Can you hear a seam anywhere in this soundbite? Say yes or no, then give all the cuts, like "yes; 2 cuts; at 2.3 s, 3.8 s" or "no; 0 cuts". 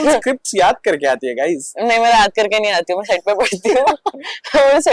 no; 0 cuts